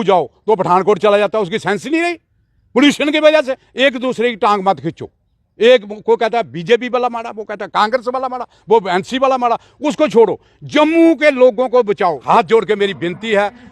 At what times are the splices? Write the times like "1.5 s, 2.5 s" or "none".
3.6 s, 12.2 s